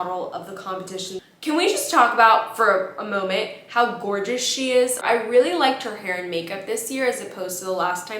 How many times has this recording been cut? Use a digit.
2